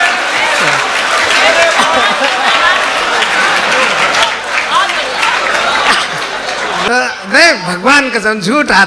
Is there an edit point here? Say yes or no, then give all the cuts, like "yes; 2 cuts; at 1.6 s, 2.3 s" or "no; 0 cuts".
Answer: yes; 1 cut; at 6.9 s